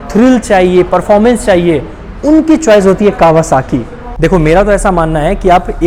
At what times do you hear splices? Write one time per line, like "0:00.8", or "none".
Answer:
none